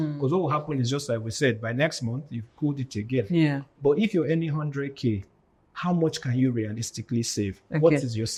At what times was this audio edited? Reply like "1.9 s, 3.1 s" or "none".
none